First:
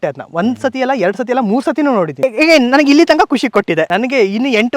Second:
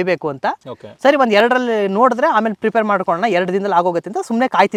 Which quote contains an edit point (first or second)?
first